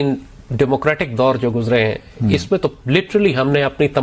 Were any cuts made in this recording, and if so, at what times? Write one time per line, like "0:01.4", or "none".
none

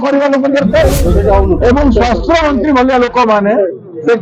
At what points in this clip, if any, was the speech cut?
0:01.0

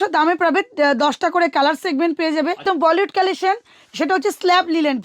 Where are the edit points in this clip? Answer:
0:02.6

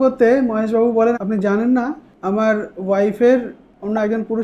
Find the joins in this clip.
0:01.2

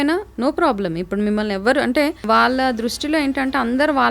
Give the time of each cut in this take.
0:02.2

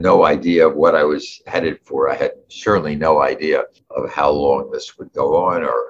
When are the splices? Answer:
0:03.8

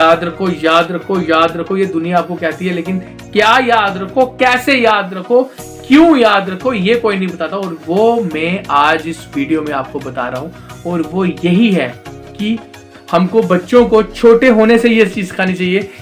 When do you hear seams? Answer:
0:12.9

